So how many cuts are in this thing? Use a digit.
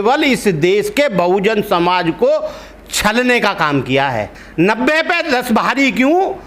1